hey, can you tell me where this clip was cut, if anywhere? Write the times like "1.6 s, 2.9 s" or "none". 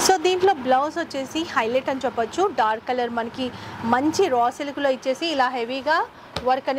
none